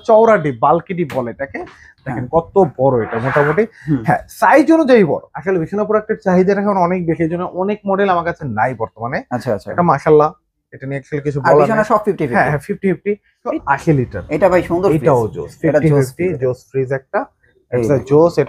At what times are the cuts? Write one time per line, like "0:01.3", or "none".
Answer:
0:05.3
0:13.5